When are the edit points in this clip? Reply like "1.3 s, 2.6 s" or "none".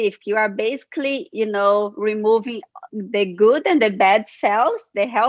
none